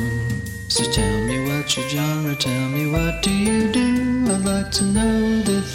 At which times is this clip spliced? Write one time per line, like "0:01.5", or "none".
none